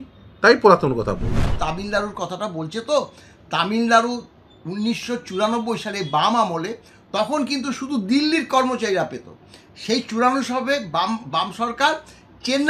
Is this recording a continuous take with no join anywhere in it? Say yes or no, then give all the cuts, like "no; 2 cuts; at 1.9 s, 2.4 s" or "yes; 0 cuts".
no; 1 cut; at 1.5 s